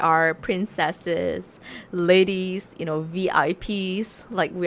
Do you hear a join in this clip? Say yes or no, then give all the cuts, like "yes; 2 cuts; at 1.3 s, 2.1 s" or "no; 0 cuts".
no; 0 cuts